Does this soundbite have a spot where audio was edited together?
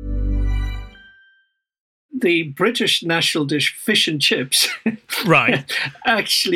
yes; 1 cut; at 1.9 s

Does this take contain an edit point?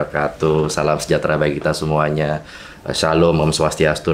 no; 0 cuts

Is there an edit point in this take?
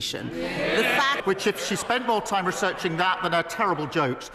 yes; 1 cut; at 1.2 s

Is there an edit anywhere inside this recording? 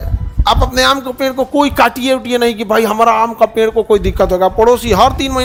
no; 0 cuts

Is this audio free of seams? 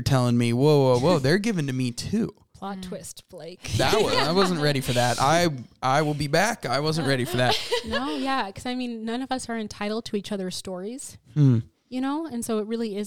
yes; 0 cuts

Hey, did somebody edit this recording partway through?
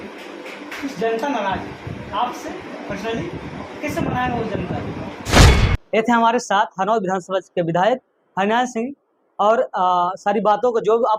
yes; 1 cut; at 5.6 s

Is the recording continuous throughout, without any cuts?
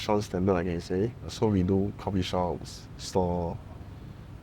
no; 1 cut; at 1.2 s

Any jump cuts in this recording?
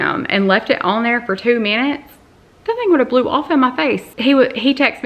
no; 0 cuts

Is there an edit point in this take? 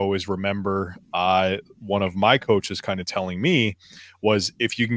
no; 0 cuts

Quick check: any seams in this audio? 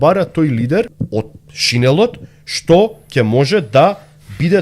yes; 1 cut; at 1.0 s

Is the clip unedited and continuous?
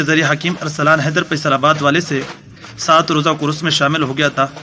yes; 0 cuts

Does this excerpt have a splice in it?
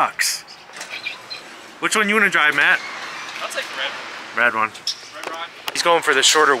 yes; 2 cuts; at 1.4 s, 5.8 s

